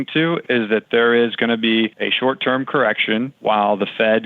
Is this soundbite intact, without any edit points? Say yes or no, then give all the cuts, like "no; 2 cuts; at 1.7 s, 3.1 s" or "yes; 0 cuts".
no; 2 cuts; at 2.0 s, 3.3 s